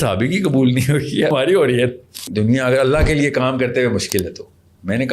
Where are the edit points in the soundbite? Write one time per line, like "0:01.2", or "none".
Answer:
0:01.3
0:02.3